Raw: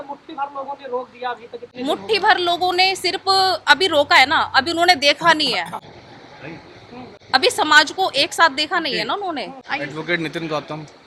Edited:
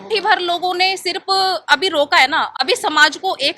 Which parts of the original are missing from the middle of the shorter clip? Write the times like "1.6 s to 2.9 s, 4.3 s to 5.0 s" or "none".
4.5 s to 7.2 s